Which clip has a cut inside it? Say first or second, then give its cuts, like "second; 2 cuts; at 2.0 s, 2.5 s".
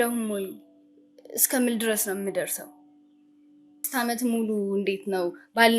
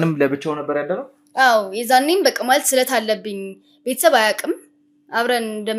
first; 1 cut; at 3.9 s